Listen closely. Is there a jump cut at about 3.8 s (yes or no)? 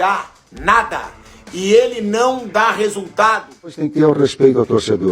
yes